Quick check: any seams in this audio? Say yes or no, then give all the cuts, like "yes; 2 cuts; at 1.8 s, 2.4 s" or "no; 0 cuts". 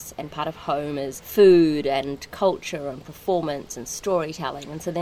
yes; 1 cut; at 1.2 s